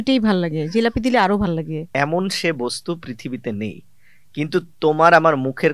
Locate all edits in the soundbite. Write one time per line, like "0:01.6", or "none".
0:01.8